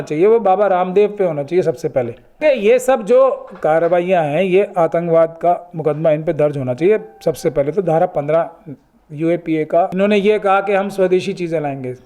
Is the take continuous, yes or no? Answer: no